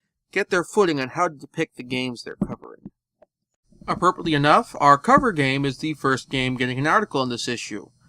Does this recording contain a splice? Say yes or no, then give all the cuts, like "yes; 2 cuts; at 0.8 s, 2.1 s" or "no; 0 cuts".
yes; 1 cut; at 5.8 s